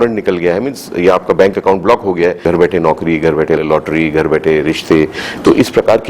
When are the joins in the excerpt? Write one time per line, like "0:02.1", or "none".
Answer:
0:02.4
0:03.6